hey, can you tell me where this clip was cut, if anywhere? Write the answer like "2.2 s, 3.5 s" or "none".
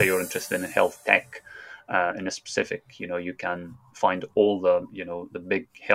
none